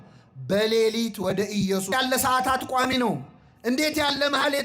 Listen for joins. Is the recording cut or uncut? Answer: cut